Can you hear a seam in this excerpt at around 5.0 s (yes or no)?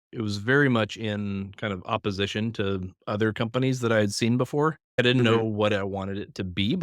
yes